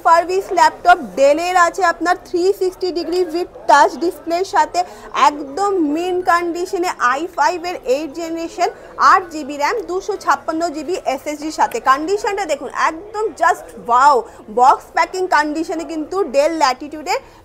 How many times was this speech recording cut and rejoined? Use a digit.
0